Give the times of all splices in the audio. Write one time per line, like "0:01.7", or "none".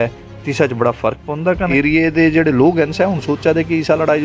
0:01.7